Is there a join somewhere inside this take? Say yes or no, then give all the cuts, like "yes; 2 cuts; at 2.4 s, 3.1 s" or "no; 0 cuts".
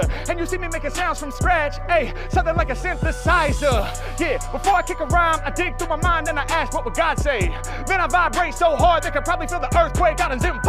no; 0 cuts